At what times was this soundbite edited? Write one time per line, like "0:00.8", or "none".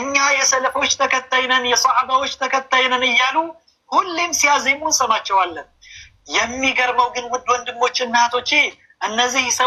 none